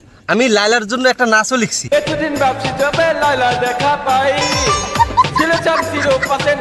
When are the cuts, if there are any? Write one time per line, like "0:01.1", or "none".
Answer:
0:01.8